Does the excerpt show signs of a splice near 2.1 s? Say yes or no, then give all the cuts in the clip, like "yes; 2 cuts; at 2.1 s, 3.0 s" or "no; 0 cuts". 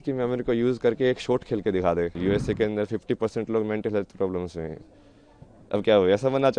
yes; 1 cut; at 2.1 s